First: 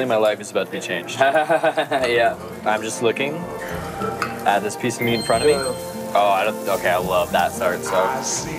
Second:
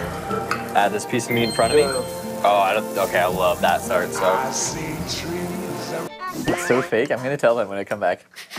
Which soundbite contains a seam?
second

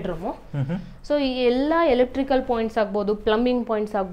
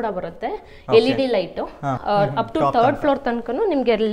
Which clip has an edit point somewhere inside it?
second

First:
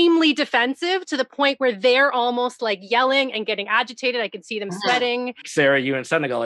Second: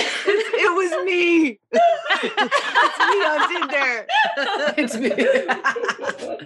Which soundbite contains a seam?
first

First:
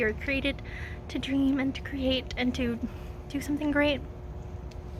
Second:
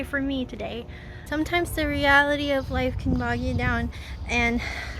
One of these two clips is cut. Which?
second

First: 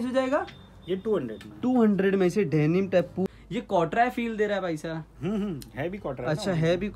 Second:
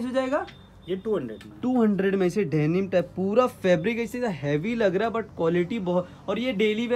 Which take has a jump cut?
first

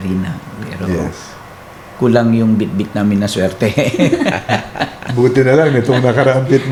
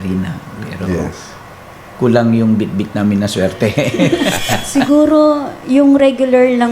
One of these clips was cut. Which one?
second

